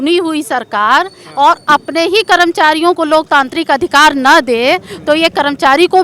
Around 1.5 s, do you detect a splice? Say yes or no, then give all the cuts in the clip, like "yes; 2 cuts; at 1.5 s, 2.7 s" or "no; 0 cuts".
no; 0 cuts